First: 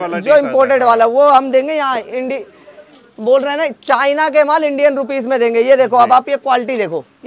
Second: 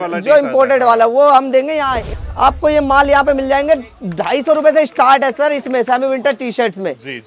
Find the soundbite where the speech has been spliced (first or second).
second